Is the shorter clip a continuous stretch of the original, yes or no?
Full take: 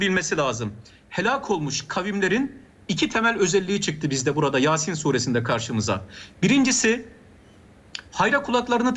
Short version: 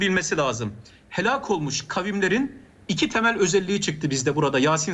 yes